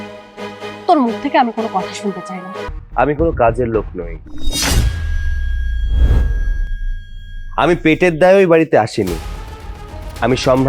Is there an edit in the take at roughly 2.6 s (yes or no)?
yes